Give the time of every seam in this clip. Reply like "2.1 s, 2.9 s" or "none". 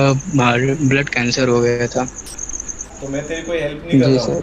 2.8 s